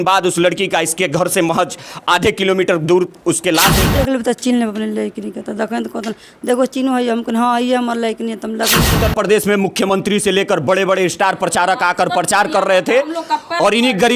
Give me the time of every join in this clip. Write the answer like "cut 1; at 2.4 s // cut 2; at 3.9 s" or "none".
cut 1; at 3.9 s // cut 2; at 9.0 s